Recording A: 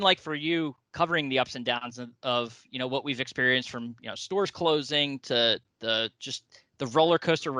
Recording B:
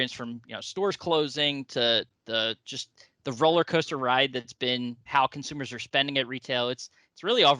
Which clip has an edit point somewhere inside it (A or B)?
B